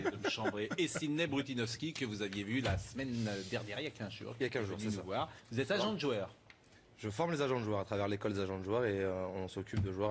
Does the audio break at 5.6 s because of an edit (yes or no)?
no